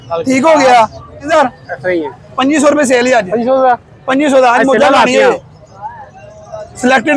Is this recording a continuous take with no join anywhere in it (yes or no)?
no